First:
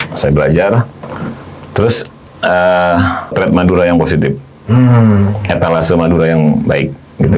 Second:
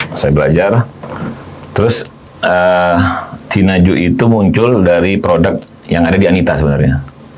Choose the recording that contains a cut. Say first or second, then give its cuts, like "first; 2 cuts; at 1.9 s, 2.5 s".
first; 1 cut; at 3.3 s